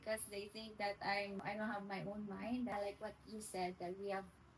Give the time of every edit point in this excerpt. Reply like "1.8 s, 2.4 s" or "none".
1.4 s, 2.7 s